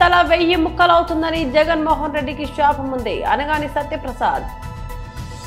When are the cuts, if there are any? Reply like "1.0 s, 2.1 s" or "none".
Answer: 4.5 s